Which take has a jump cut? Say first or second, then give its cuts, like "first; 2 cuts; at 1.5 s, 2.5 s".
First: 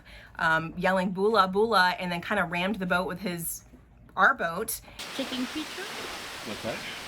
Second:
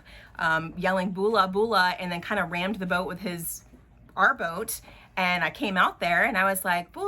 first; 1 cut; at 5.1 s